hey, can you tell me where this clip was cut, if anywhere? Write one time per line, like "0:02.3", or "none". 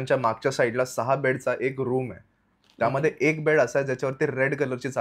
none